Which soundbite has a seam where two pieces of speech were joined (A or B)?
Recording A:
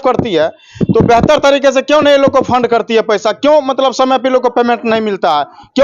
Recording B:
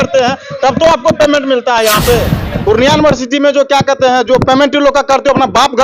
B